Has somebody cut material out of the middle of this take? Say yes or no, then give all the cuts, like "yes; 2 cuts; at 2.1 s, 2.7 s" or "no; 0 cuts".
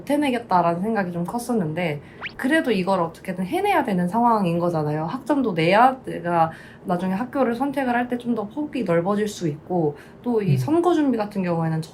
no; 0 cuts